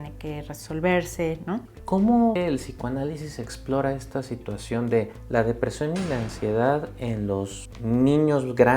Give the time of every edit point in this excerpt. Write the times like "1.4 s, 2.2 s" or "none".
1.7 s, 2.4 s